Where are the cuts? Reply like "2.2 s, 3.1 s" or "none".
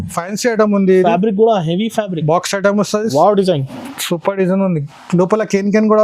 3.1 s